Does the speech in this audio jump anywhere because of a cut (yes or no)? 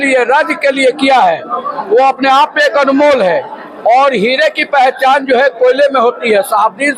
no